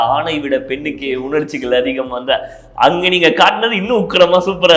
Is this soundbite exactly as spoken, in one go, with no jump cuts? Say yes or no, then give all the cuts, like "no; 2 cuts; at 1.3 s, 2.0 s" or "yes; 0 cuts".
yes; 0 cuts